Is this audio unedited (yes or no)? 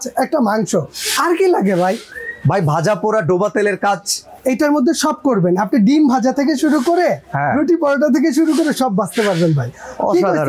yes